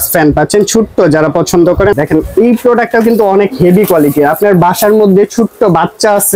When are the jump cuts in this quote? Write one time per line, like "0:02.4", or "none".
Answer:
0:01.9